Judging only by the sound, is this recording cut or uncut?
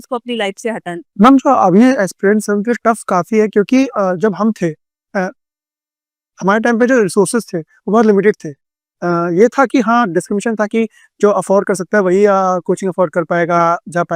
uncut